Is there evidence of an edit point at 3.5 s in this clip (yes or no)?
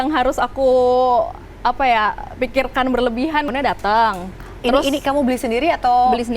yes